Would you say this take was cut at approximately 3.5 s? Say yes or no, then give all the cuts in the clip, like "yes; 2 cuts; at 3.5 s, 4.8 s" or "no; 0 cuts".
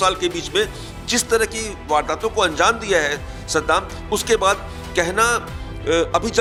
no; 0 cuts